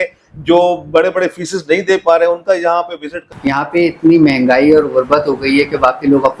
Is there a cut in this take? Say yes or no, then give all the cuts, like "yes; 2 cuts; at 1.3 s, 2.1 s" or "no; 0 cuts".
yes; 1 cut; at 3.2 s